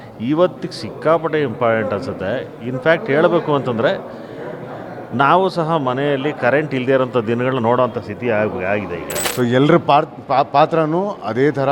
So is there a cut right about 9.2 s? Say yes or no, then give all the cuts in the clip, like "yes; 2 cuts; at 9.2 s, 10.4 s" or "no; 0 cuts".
yes; 1 cut; at 9.2 s